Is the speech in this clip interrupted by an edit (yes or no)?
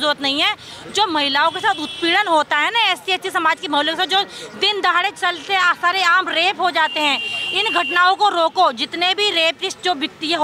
no